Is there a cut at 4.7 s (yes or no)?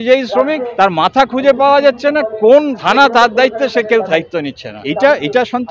yes